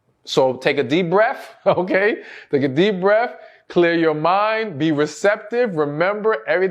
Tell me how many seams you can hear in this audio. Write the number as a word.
zero